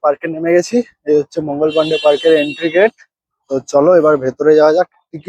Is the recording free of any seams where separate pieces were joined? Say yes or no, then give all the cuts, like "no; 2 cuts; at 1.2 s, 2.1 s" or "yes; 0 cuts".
yes; 0 cuts